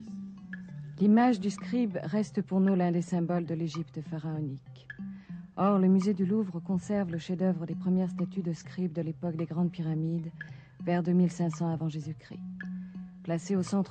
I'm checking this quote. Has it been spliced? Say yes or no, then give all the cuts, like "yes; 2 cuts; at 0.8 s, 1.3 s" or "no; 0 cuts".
no; 0 cuts